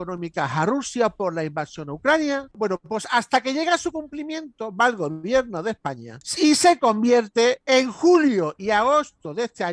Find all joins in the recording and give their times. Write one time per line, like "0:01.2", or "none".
0:02.5